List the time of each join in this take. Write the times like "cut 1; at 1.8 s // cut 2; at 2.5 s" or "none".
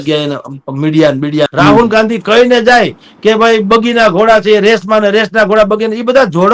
cut 1; at 1.5 s